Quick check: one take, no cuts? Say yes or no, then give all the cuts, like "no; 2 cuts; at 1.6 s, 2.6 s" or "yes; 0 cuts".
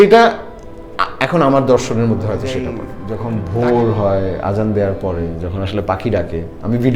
no; 1 cut; at 3.0 s